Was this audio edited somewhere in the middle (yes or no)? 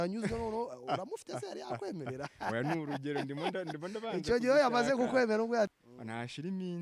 yes